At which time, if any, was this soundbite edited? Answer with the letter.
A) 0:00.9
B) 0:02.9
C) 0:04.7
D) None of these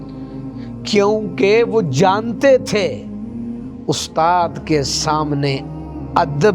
A